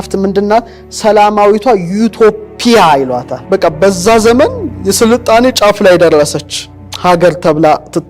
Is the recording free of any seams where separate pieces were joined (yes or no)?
no